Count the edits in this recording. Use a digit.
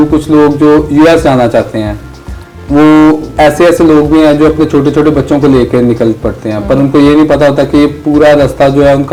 0